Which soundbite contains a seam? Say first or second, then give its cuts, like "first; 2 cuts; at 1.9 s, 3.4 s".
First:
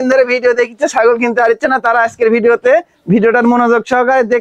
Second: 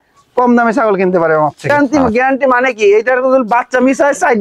second; 1 cut; at 1.7 s